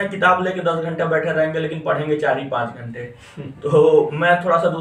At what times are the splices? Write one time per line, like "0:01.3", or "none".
none